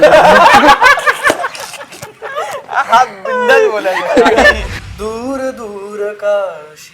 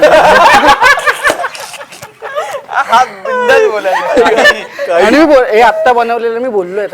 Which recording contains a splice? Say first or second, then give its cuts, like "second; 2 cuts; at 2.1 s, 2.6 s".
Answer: first; 1 cut; at 4.7 s